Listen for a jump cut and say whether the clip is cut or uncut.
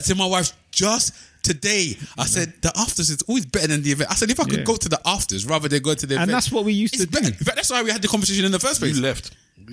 uncut